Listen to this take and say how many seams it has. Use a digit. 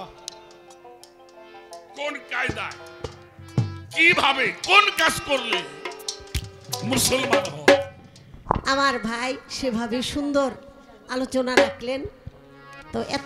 1